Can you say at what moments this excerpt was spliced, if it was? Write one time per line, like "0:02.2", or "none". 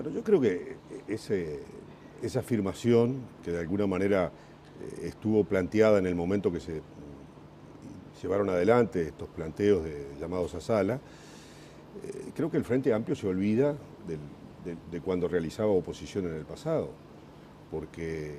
0:16.4